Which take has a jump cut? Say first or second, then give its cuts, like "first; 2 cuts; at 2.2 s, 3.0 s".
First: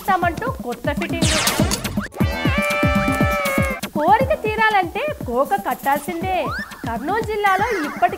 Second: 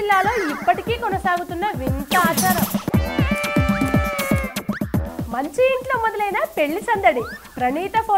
second; 1 cut; at 2.9 s